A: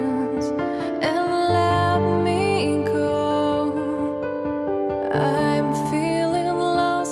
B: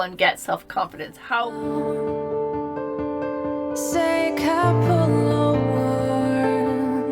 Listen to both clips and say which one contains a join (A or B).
B